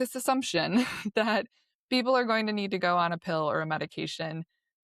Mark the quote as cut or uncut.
uncut